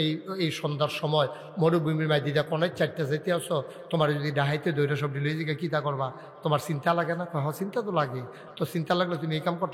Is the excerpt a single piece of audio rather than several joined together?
yes; 0 cuts

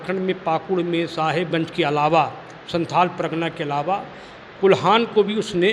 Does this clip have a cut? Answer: no; 0 cuts

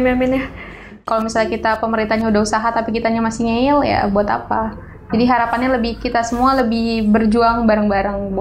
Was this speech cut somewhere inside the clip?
yes; 1 cut; at 1.0 s

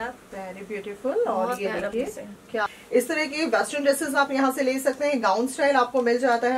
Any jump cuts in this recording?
yes; 1 cut; at 2.7 s

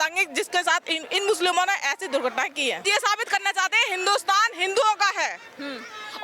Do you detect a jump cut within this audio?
yes; 1 cut; at 2.8 s

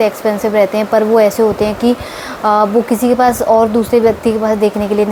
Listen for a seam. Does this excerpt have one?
no; 0 cuts

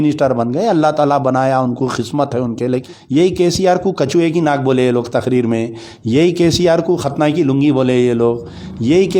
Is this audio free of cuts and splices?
no; 1 cut; at 2.9 s

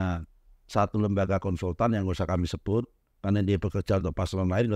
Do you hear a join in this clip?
no; 0 cuts

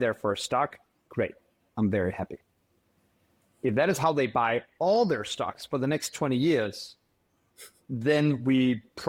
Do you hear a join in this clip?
no; 0 cuts

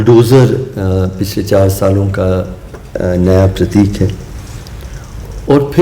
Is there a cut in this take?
no; 0 cuts

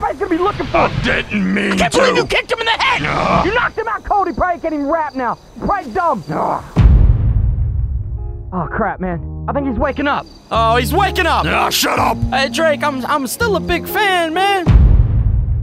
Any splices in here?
yes; 1 cut; at 14.6 s

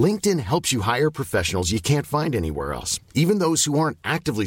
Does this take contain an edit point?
no; 0 cuts

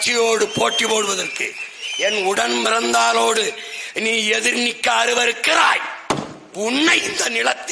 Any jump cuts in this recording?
no; 0 cuts

